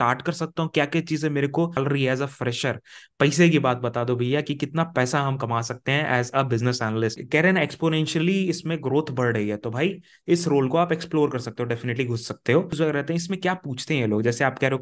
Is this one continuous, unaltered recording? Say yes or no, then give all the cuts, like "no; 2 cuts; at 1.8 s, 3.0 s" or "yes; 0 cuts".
no; 3 cuts; at 1.8 s, 7.2 s, 12.8 s